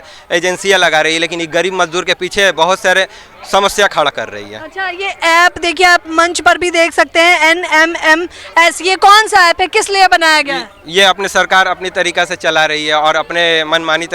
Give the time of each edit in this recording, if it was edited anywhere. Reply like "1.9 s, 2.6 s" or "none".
none